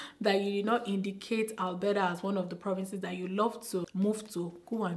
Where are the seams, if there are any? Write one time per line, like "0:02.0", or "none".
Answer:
0:03.9